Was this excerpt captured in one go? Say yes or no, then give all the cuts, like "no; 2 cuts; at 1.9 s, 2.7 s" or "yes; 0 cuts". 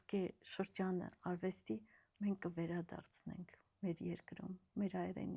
yes; 0 cuts